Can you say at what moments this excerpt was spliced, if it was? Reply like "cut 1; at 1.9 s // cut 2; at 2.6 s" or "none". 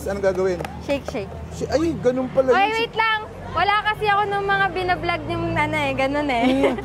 none